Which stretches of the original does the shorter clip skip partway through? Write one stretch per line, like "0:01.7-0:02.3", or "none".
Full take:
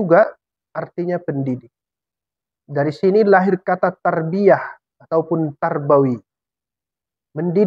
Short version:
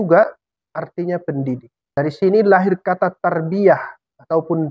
0:02.0-0:02.8